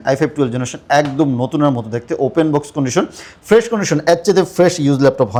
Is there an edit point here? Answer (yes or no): no